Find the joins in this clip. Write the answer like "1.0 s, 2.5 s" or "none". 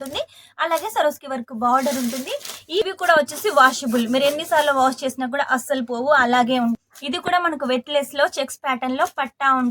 2.8 s, 6.8 s

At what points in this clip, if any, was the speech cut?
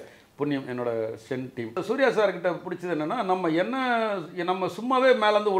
1.8 s

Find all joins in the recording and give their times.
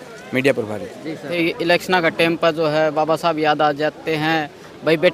1.4 s

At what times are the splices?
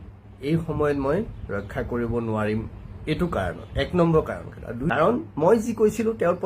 4.8 s

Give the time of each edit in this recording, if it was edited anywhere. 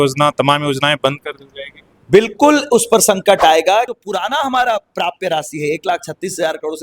3.9 s

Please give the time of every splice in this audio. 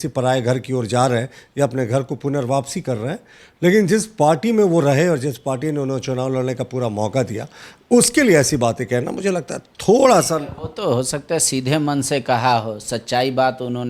none

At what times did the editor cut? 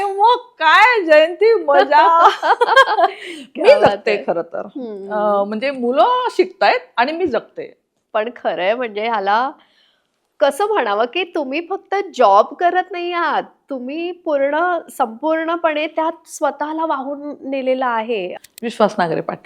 18.3 s

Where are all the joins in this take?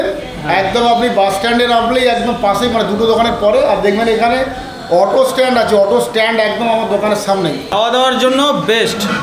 7.7 s

